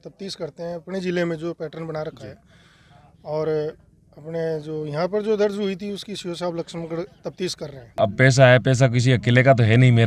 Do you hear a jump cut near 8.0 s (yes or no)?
yes